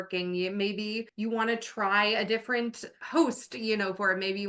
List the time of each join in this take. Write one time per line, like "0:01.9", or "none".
0:01.1
0:03.0